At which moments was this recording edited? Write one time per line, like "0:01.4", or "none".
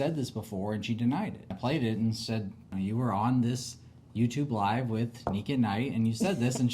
0:01.5
0:02.6

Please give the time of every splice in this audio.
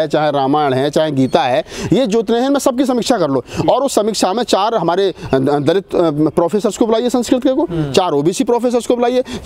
none

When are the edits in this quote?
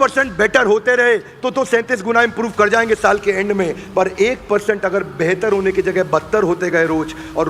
none

